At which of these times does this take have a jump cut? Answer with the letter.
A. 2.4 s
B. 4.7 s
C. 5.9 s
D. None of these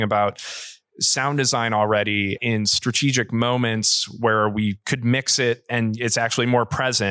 A